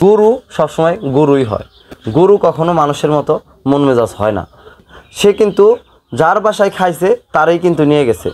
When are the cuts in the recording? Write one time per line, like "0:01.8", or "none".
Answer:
0:04.8